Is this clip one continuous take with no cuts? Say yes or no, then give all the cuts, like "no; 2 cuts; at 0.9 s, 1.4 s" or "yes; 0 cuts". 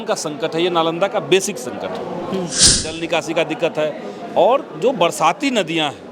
no; 1 cut; at 2.5 s